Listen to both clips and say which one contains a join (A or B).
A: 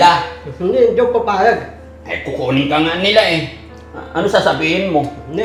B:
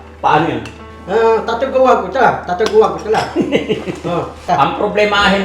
B